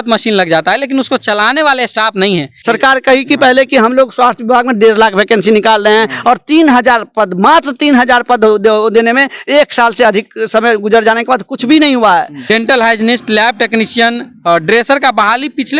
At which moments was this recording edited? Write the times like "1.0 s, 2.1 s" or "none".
2.5 s, 12.3 s